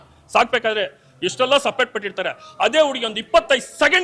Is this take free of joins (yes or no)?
yes